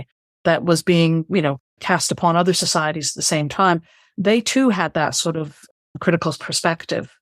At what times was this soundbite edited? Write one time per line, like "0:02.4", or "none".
none

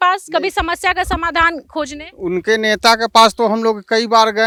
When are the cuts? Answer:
none

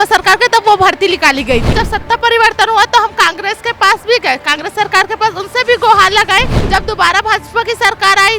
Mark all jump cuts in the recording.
0:01.8
0:06.6

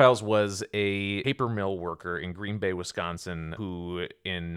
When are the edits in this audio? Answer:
0:01.2
0:03.5

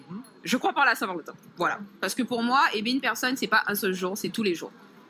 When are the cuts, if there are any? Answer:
none

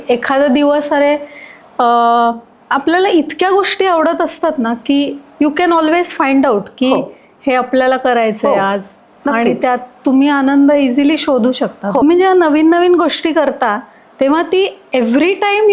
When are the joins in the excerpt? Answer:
0:12.0

